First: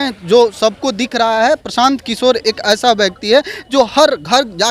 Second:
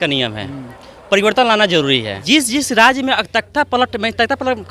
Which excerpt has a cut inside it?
second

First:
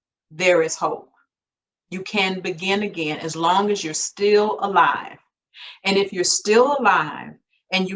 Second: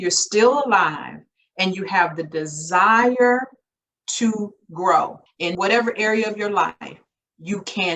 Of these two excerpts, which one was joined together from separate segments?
second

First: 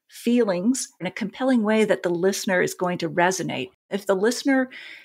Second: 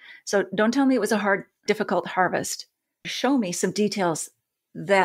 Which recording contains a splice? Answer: first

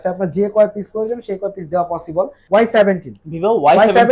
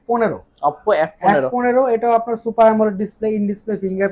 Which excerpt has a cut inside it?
first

